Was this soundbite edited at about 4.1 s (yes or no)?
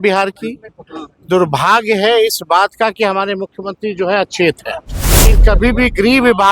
no